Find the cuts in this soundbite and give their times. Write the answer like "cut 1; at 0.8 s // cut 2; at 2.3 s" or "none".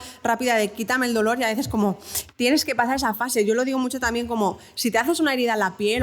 none